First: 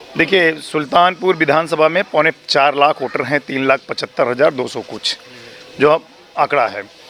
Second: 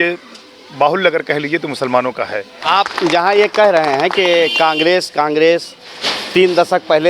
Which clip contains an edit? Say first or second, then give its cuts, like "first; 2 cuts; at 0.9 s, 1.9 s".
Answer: second; 1 cut; at 2.6 s